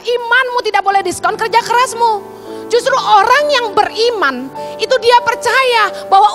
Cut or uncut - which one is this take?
uncut